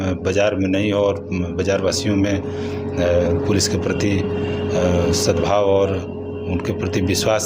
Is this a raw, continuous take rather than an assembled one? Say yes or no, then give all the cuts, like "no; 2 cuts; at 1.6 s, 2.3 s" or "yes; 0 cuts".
yes; 0 cuts